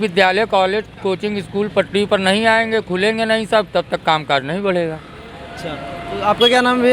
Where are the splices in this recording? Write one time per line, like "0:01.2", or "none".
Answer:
none